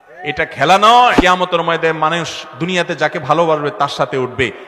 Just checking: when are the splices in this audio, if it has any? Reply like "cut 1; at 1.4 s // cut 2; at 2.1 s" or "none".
cut 1; at 1.2 s

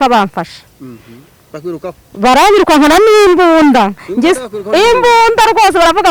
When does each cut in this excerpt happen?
none

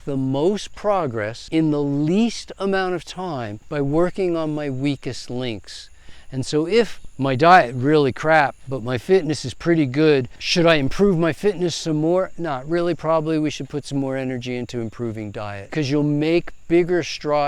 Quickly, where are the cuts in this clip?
cut 1; at 1.3 s // cut 2; at 3.6 s // cut 3; at 10.4 s // cut 4; at 15.6 s

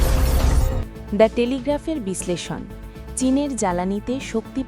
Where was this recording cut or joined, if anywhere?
cut 1; at 1.1 s

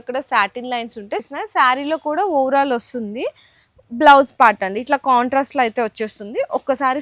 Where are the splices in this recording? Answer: cut 1; at 1.2 s

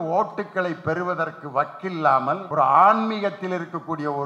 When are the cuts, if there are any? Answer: cut 1; at 2.5 s

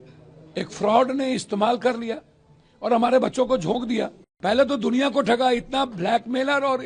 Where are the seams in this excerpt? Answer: cut 1; at 4.2 s

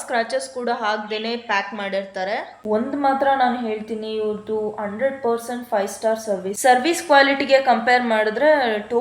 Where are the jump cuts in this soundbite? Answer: cut 1; at 2.5 s // cut 2; at 6.5 s

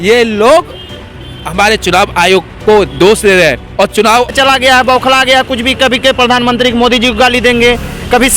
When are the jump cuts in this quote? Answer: cut 1; at 4.3 s

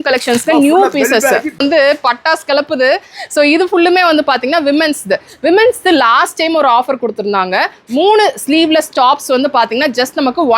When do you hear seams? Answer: cut 1; at 1.6 s

